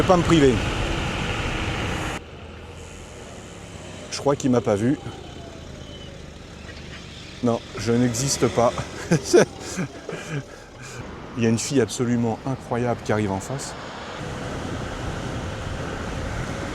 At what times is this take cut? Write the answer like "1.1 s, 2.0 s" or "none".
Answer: 2.2 s, 11.0 s, 14.2 s